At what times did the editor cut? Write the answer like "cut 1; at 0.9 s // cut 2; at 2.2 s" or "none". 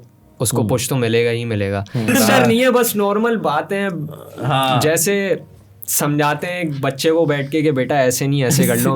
cut 1; at 2.1 s